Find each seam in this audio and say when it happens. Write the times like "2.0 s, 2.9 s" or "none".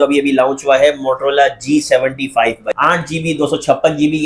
2.7 s